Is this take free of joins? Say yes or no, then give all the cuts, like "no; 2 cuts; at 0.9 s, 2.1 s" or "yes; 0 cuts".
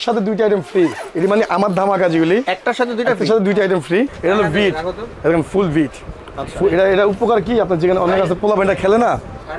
no; 1 cut; at 4.2 s